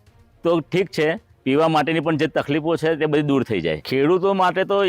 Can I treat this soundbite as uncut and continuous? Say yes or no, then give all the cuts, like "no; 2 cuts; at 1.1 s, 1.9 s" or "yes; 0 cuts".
no; 1 cut; at 3.8 s